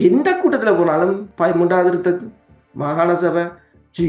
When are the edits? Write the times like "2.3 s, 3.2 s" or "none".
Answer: 1.3 s